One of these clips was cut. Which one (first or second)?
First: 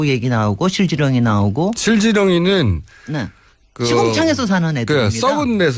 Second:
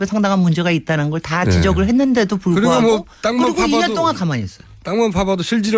second